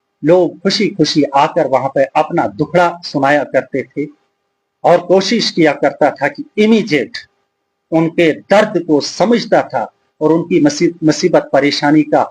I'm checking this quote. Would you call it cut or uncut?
uncut